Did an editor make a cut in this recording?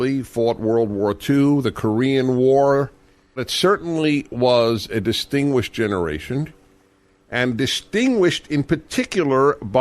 yes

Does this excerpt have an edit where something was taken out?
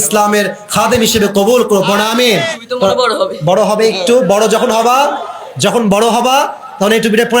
yes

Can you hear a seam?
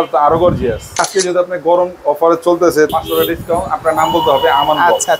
yes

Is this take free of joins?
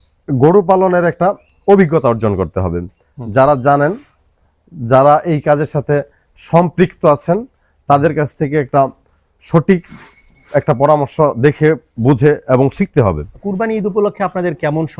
no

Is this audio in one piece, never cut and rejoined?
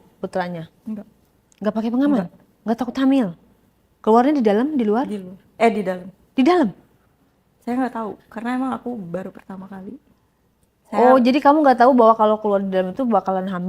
yes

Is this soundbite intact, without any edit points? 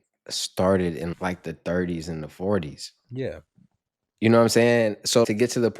yes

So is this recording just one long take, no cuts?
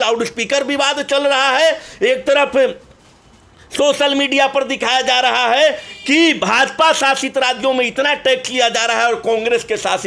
yes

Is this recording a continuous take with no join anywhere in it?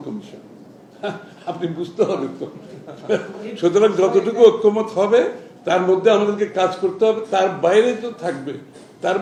yes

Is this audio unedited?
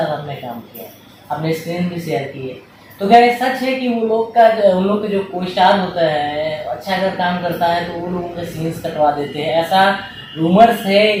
yes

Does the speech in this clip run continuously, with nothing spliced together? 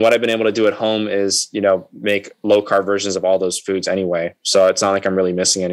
yes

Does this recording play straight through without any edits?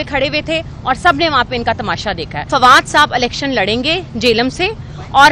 no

